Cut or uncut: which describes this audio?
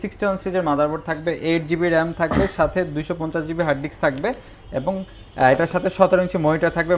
uncut